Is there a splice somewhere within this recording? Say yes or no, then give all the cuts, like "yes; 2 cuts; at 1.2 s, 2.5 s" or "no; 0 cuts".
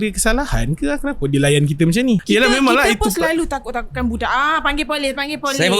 yes; 1 cut; at 2.2 s